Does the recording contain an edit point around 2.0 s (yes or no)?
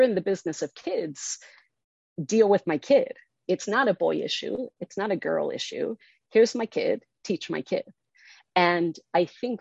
no